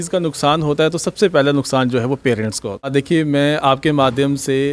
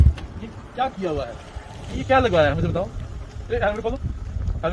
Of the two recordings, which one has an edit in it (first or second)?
first